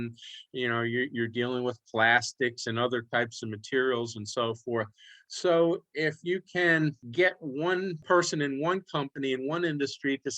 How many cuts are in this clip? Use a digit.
2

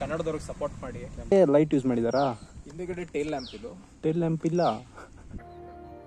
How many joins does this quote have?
1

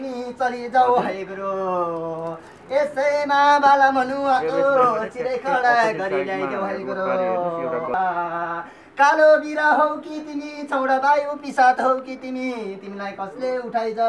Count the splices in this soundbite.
1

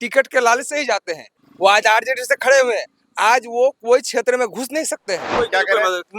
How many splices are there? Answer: 2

